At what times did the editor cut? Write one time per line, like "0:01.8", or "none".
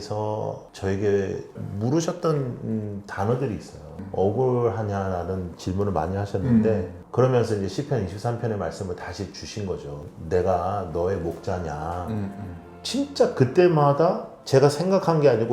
0:01.6
0:04.0
0:10.1
0:12.7